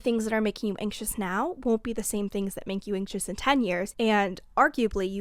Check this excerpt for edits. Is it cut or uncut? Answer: cut